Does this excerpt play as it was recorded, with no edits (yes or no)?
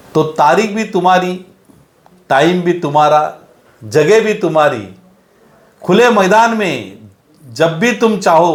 yes